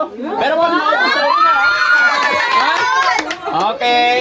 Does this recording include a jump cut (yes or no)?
no